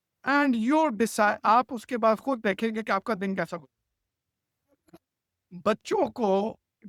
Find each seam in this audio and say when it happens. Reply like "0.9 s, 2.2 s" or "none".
none